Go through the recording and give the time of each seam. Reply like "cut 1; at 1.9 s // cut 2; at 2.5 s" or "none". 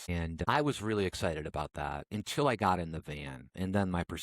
none